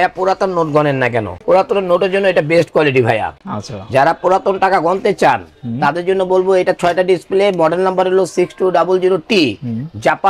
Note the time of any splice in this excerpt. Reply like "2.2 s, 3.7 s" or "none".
none

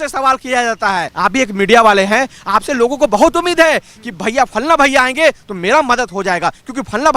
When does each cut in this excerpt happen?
1.1 s

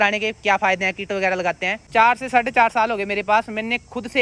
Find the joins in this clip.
1.8 s

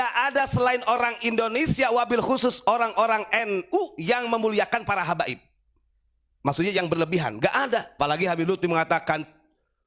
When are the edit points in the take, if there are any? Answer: 7.9 s

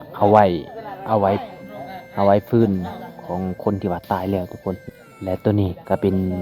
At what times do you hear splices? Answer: 5.5 s

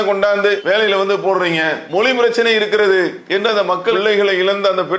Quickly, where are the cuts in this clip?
1.8 s, 3.2 s

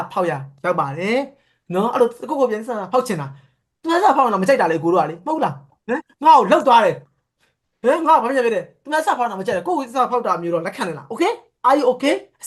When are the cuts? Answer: none

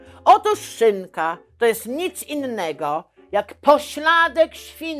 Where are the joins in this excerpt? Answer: none

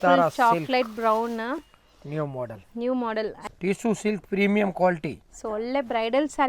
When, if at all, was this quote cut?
3.4 s

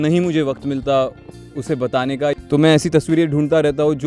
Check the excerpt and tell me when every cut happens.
2.3 s

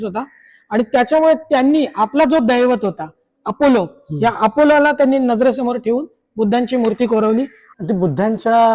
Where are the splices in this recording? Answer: 7.6 s

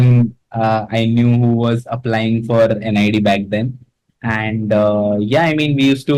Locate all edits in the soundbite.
none

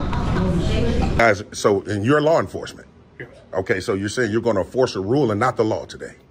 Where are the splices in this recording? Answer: 1.2 s

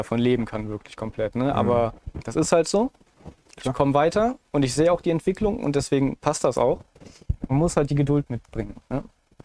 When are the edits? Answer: none

